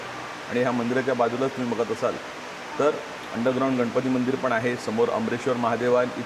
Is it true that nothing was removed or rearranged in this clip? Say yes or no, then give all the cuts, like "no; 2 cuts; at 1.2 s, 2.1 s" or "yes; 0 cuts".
yes; 0 cuts